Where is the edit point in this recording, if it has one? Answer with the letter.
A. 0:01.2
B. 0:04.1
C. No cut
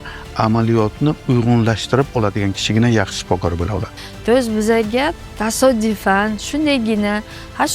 B